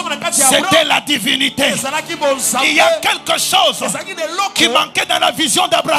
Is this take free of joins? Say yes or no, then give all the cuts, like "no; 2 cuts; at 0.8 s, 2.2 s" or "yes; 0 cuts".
yes; 0 cuts